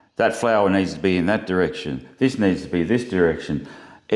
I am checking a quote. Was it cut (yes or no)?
no